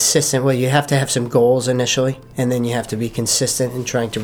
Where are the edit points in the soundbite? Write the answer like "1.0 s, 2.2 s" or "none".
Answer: none